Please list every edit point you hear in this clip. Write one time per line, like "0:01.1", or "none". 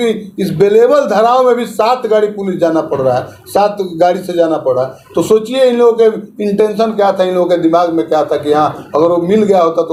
none